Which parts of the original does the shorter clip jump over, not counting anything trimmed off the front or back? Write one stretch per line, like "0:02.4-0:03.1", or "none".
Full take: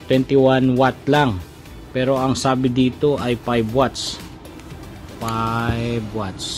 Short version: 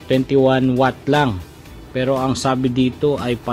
none